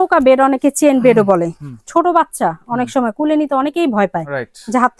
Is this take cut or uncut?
uncut